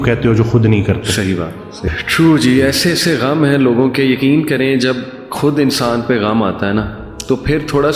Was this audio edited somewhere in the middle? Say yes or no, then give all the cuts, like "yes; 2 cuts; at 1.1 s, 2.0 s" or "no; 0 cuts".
yes; 1 cut; at 1.9 s